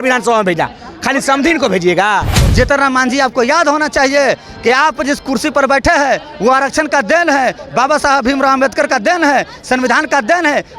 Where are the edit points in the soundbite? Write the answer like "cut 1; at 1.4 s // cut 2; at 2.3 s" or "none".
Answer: cut 1; at 2.4 s